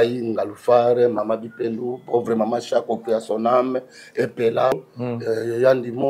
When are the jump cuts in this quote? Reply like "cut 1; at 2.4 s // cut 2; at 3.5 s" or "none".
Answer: cut 1; at 4.7 s

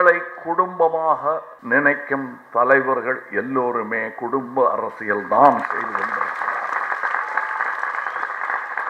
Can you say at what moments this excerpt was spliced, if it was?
cut 1; at 1.5 s

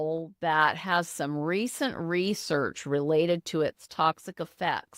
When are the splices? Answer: none

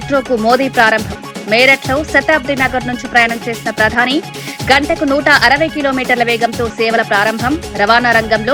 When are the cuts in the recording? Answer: none

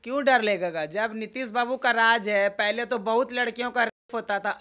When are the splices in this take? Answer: none

